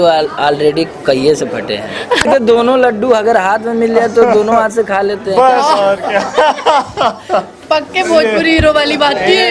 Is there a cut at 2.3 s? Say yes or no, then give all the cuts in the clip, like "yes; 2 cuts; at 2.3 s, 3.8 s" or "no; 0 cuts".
yes; 1 cut; at 2.3 s